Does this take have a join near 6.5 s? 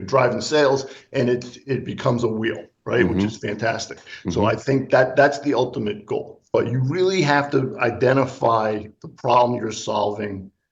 yes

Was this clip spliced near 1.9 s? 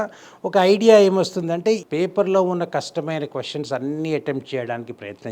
yes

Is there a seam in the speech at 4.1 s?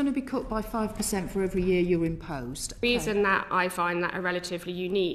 no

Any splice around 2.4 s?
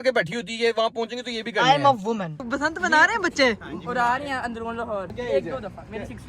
yes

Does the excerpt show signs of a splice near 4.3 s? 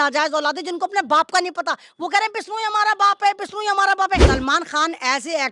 yes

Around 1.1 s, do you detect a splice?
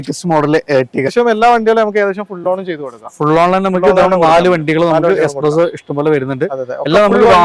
yes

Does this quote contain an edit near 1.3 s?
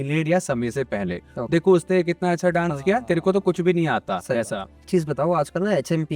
yes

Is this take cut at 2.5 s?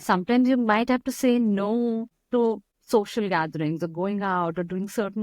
yes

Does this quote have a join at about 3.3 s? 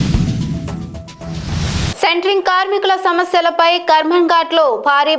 no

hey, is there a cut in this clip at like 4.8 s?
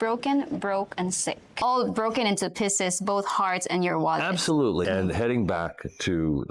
yes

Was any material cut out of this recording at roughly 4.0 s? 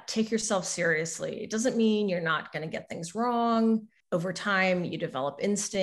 yes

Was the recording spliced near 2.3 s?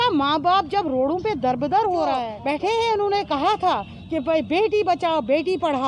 yes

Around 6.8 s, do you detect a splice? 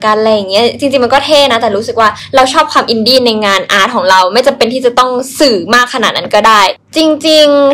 yes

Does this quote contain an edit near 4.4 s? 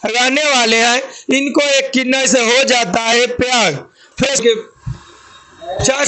yes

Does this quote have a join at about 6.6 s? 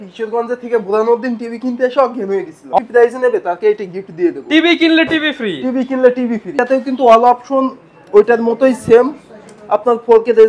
yes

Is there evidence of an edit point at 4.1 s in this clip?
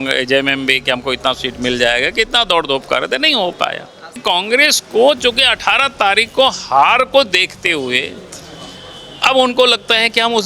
yes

